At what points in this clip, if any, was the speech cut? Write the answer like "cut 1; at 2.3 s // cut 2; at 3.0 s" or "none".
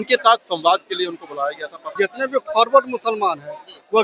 cut 1; at 1.9 s